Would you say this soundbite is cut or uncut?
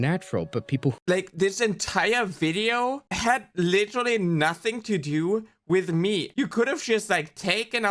cut